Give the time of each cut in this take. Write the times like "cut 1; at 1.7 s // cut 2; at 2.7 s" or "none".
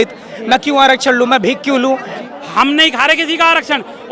cut 1; at 2.2 s